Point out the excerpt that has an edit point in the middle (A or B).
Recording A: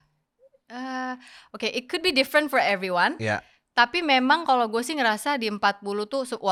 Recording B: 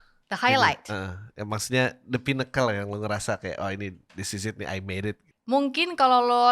B